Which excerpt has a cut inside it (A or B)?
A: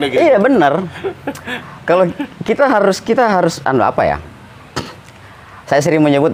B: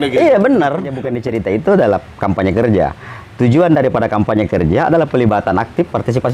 B